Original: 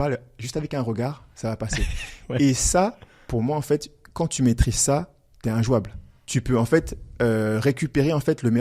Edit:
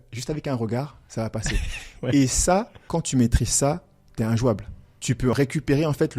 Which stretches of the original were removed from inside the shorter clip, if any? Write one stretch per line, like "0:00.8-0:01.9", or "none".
0:03.0-0:04.0
0:06.6-0:07.6